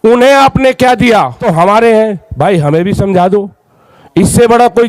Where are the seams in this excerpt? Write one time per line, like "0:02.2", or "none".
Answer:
0:01.4